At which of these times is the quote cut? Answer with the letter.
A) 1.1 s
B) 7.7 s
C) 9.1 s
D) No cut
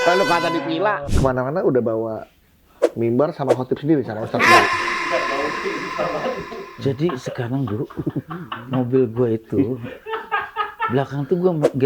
A